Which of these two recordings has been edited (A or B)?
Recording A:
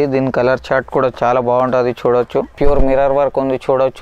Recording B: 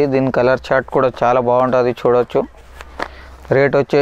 A